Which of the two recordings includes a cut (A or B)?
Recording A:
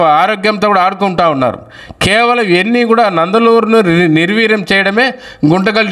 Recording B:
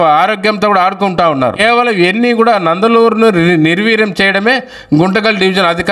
B